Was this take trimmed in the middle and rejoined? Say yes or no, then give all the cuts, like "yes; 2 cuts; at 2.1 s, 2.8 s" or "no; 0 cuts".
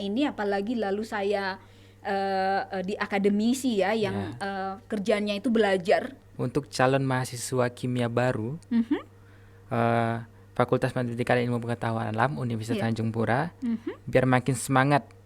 yes; 1 cut; at 6.2 s